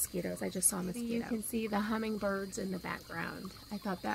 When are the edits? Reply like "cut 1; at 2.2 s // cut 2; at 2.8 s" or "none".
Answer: cut 1; at 1.3 s